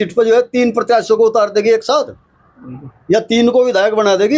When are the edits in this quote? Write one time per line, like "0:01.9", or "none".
none